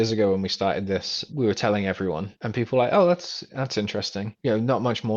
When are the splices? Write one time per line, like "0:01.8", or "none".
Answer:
0:01.3
0:02.4
0:04.3